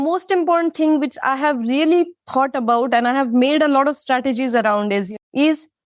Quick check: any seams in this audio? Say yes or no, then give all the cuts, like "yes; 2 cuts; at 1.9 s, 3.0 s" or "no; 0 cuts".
no; 0 cuts